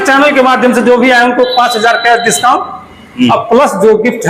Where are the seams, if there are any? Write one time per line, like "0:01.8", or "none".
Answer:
none